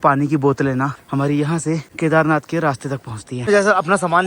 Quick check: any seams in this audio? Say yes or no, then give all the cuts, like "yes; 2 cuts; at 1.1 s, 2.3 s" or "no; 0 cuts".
yes; 3 cuts; at 1.0 s, 1.9 s, 3.4 s